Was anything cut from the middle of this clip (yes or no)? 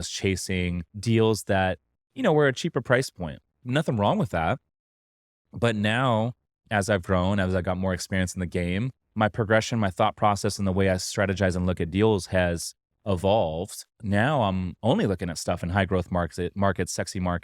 yes